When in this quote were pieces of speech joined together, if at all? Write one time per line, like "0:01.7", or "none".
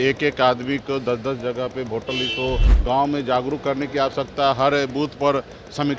0:02.7